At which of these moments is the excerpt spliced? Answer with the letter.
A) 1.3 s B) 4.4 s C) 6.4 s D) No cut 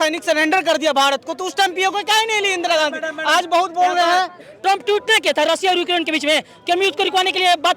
B